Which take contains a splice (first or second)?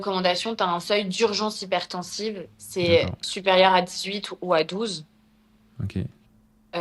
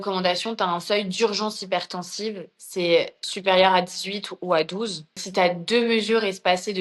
second